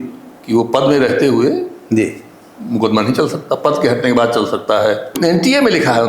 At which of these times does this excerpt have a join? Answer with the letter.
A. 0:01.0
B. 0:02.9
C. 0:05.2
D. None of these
C